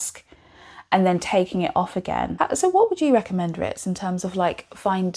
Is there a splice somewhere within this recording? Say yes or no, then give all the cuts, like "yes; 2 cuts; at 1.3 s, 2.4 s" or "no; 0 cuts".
yes; 1 cut; at 2.3 s